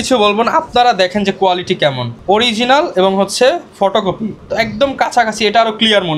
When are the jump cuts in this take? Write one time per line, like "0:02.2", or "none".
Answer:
none